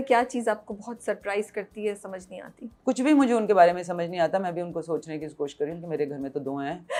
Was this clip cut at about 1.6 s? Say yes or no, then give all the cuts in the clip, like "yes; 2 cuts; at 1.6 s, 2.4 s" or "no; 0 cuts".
no; 0 cuts